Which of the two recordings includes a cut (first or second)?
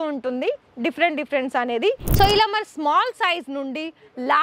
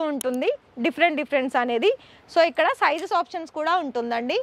first